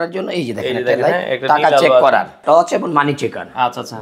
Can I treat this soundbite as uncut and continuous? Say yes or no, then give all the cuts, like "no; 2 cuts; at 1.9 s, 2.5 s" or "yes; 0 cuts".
no; 1 cut; at 2.4 s